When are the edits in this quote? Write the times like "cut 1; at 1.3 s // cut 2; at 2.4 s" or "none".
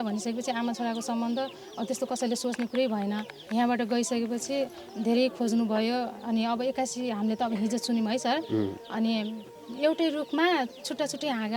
cut 1; at 3.3 s // cut 2; at 9.6 s